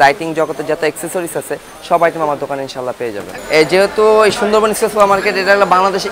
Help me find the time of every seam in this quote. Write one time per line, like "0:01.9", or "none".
0:03.3